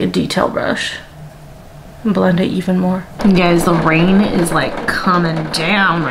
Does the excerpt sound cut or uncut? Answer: cut